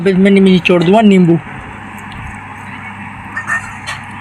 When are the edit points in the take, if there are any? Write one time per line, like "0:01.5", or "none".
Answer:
none